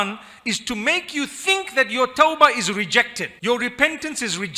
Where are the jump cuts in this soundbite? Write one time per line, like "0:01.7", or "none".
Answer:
none